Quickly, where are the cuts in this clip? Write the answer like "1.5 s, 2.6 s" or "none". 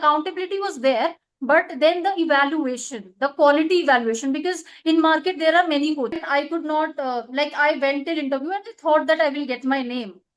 6.2 s